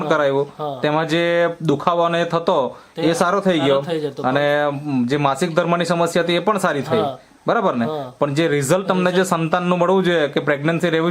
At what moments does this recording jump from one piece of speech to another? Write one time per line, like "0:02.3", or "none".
none